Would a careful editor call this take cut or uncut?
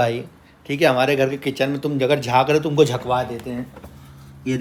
uncut